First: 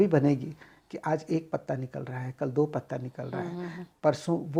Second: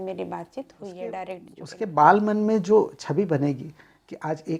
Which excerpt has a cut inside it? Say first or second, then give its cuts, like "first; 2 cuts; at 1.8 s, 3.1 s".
second; 1 cut; at 1.6 s